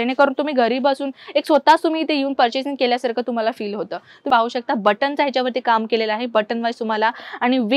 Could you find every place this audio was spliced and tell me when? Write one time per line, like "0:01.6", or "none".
0:04.2